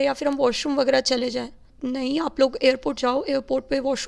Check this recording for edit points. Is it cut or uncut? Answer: cut